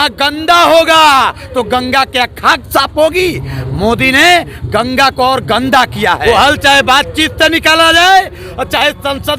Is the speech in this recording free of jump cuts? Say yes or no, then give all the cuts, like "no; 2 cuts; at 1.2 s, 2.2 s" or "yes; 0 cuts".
no; 1 cut; at 6.2 s